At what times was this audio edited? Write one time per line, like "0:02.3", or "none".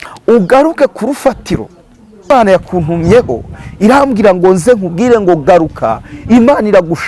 0:02.3